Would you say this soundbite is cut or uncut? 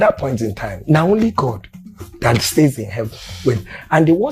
uncut